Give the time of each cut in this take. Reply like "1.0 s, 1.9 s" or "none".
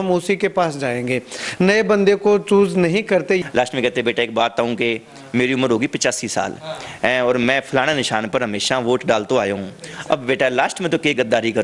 3.4 s